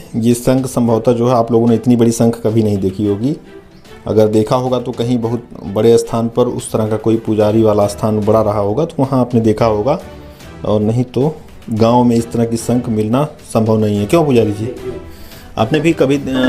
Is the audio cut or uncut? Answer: uncut